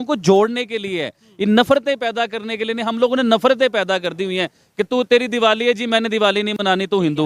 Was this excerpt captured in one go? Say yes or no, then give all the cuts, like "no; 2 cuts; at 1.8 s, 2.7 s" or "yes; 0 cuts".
yes; 0 cuts